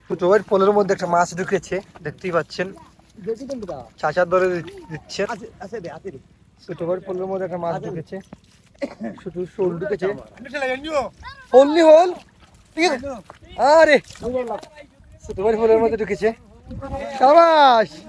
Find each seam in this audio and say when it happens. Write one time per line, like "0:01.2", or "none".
0:05.3
0:08.7